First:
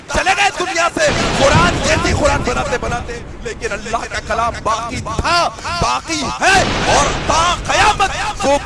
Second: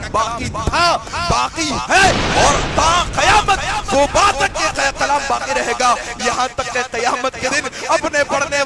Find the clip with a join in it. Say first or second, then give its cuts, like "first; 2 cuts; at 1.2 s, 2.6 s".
first; 1 cut; at 3.1 s